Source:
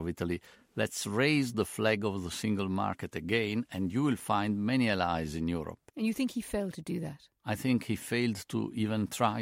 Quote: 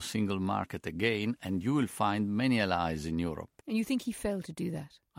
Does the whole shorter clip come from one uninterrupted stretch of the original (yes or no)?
yes